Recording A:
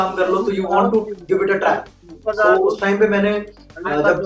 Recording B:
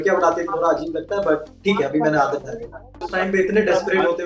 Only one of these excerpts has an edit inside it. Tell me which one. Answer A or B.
B